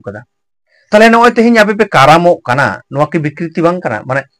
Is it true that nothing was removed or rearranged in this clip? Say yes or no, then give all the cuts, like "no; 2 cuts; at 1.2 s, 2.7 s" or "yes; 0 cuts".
yes; 0 cuts